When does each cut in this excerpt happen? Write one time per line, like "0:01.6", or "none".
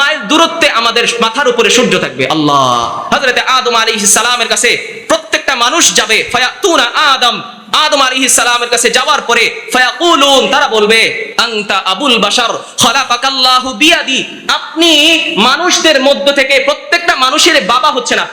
0:03.0